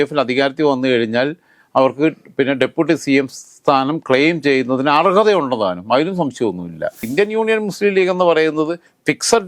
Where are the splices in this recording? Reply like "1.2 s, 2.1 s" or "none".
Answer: 7.1 s